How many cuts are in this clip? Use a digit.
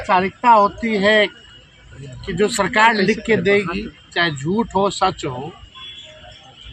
0